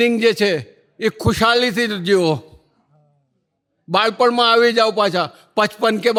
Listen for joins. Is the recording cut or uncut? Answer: uncut